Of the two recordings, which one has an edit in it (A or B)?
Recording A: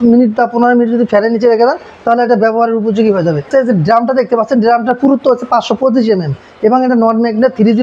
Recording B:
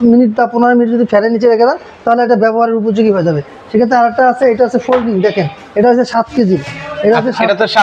A